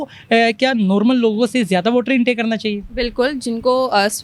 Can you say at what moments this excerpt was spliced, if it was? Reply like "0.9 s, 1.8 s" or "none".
none